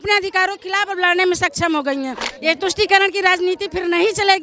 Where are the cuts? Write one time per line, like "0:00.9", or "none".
0:02.2